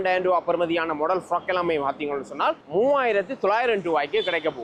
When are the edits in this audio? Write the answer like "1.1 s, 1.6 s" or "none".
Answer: none